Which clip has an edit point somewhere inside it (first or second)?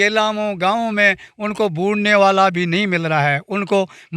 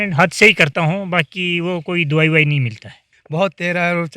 second